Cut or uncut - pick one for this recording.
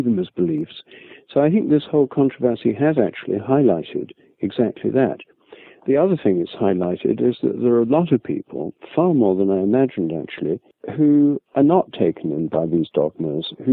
uncut